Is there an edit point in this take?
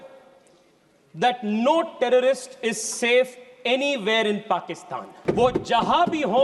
yes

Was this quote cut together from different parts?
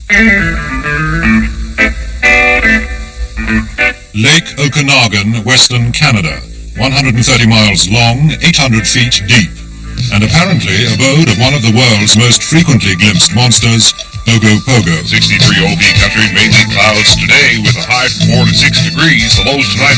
no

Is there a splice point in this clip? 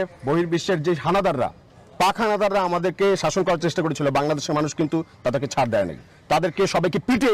no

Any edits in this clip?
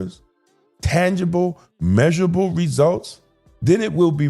no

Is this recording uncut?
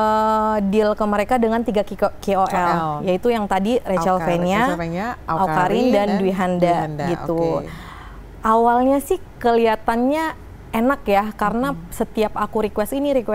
yes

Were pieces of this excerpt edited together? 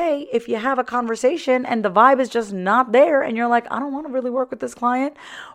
no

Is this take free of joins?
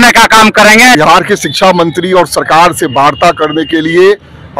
no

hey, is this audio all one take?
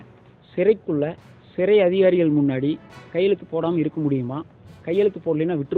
yes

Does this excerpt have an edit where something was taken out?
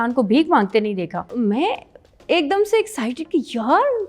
yes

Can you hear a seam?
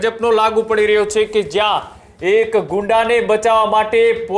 no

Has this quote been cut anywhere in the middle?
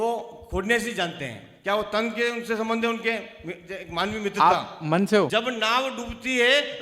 yes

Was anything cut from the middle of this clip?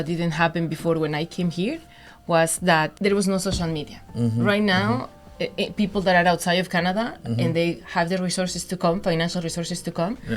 yes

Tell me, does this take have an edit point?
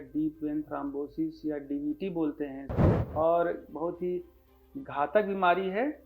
yes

